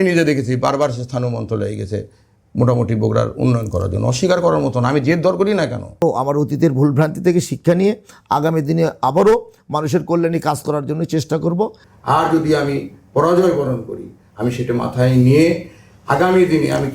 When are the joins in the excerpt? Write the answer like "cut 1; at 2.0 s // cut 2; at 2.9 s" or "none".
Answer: cut 1; at 6.0 s // cut 2; at 11.8 s